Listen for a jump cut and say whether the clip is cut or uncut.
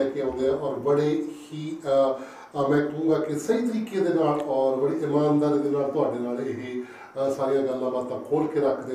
uncut